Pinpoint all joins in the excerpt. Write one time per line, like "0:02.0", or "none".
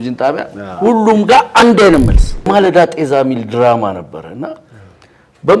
0:02.5

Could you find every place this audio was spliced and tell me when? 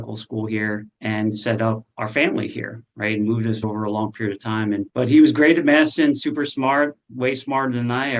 none

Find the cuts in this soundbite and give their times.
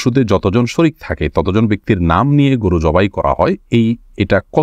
none

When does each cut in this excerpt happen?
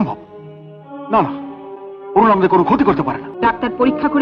0:03.2

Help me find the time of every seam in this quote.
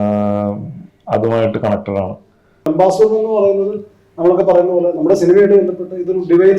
0:02.7

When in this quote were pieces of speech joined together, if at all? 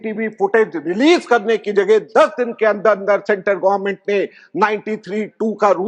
none

